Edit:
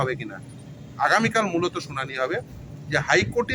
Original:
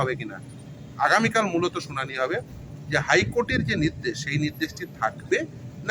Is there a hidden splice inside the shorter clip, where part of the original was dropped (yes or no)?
no